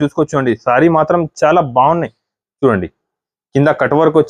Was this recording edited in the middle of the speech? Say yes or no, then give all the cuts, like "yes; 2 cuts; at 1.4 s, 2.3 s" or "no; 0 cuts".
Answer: no; 0 cuts